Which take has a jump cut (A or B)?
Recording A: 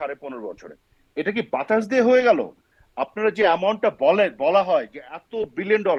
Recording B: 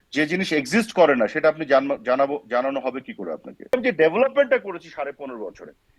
B